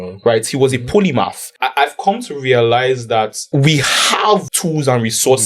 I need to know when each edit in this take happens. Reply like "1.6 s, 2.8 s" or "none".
1.4 s, 3.4 s, 4.5 s